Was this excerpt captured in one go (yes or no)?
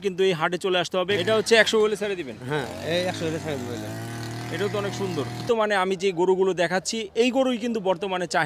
no